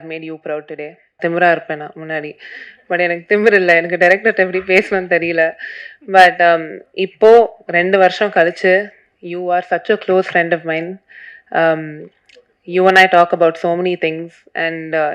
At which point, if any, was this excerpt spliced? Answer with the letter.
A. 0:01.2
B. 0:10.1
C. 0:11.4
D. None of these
A